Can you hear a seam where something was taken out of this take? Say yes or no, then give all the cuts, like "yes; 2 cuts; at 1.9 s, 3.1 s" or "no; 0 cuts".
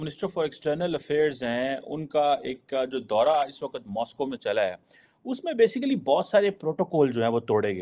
no; 0 cuts